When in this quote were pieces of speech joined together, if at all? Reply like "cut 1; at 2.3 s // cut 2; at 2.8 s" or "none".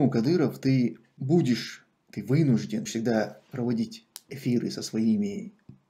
cut 1; at 1.2 s // cut 2; at 2.9 s